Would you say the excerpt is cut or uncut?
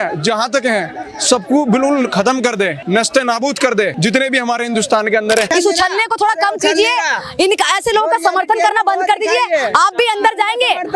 cut